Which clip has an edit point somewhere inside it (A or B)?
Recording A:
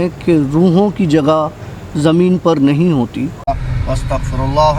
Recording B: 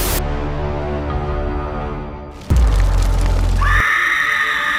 A